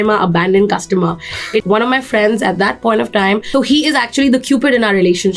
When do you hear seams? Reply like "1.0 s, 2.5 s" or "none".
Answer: 1.6 s